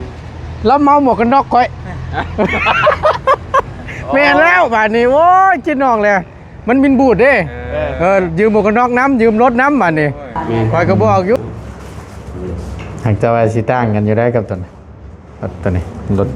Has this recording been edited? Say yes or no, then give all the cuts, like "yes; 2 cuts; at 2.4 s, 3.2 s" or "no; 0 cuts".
yes; 1 cut; at 11.4 s